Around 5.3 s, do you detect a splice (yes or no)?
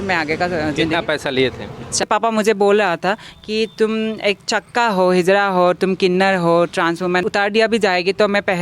no